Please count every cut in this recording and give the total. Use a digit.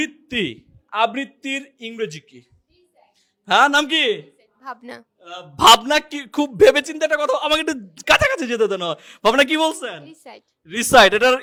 0